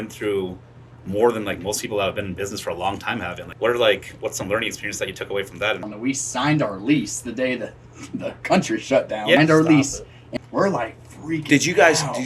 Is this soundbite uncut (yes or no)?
no